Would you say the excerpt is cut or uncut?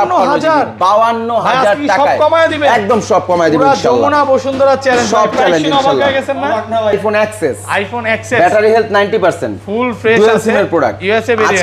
cut